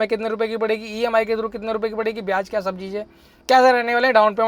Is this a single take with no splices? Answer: yes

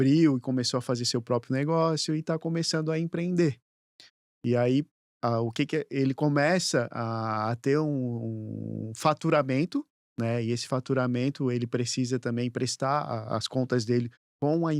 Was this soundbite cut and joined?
no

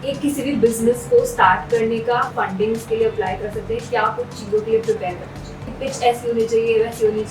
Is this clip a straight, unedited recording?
no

